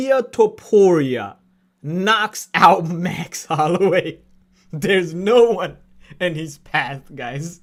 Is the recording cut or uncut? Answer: uncut